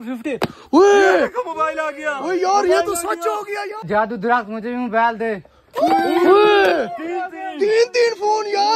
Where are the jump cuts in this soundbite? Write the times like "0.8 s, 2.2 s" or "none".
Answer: 3.8 s